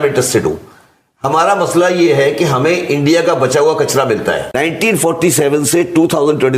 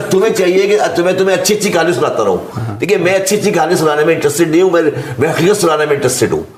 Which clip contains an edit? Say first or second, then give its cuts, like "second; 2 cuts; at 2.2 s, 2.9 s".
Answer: first; 1 cut; at 4.5 s